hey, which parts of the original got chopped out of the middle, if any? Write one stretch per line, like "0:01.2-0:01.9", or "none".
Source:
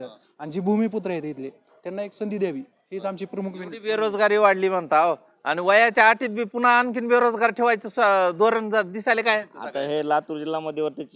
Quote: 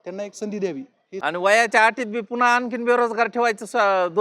0:02.9-0:05.3

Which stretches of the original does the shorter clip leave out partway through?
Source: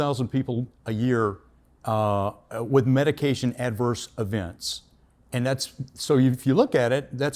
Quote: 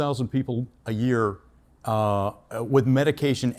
none

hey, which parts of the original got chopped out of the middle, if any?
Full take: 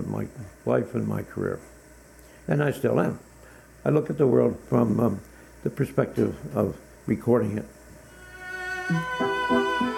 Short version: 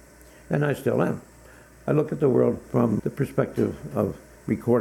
0:05.0-0:05.6

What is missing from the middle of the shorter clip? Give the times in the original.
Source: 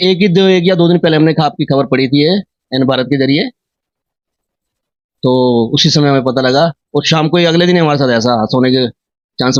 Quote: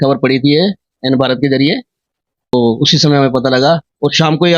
0:04.2-0:05.4

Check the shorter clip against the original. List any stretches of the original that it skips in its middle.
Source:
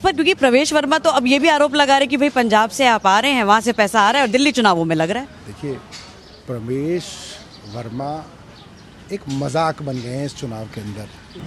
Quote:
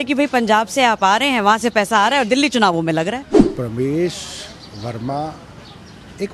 0:05.4-0:06.3

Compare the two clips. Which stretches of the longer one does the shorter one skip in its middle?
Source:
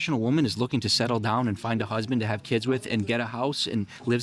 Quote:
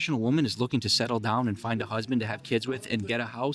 none

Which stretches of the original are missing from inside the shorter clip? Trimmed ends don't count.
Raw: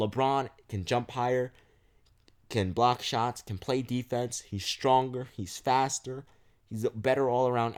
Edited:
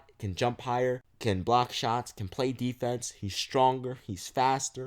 0:01.6-0:02.4

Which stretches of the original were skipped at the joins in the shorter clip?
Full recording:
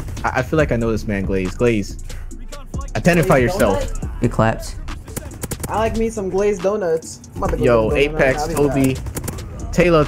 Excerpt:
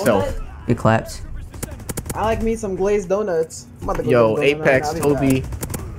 none

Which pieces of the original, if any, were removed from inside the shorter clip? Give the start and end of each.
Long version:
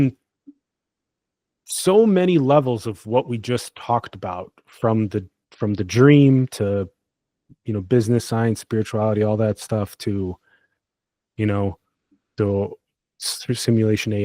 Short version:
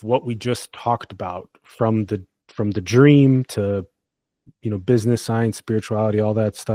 none

